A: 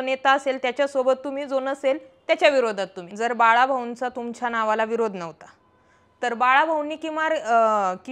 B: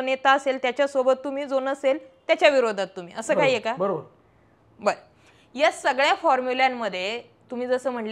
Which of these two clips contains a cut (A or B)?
A